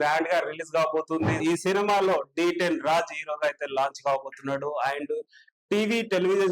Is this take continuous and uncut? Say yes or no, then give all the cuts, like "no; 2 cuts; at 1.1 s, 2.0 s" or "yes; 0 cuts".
no; 1 cut; at 1.4 s